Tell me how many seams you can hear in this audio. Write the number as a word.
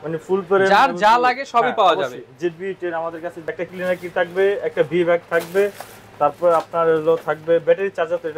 one